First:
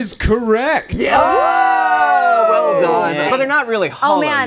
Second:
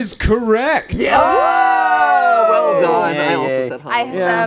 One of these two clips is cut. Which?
first; 1 cut; at 3.3 s

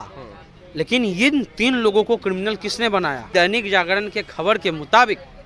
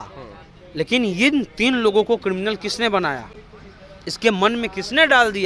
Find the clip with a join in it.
first; 1 cut; at 3.3 s

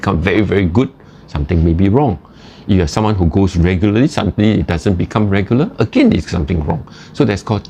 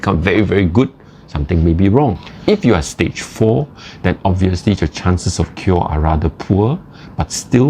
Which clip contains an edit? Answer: second; 1 cut; at 2.3 s

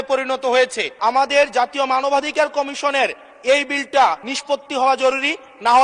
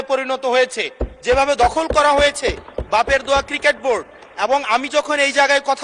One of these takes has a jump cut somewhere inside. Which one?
first; 2 cuts; at 0.9 s, 4.3 s

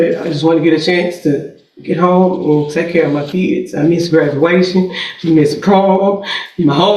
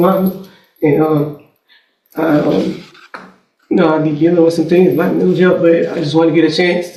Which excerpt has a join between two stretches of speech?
first; 1 cut; at 4.1 s

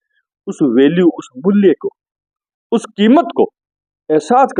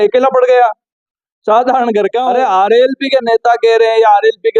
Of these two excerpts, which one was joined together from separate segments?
second; 1 cut; at 2.3 s

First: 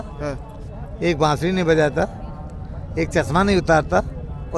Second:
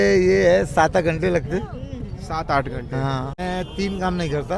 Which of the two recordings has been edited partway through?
second; 1 cut; at 3.3 s

